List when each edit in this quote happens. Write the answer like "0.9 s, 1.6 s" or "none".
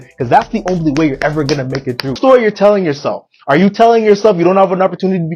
2.2 s